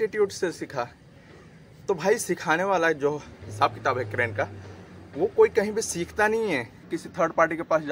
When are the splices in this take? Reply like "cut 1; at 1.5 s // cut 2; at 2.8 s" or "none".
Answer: cut 1; at 6.9 s